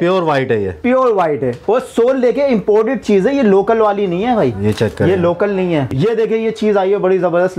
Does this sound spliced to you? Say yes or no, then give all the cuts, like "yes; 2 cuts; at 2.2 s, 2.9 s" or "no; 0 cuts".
yes; 1 cut; at 5.9 s